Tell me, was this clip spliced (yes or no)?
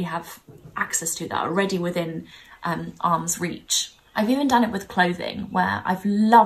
no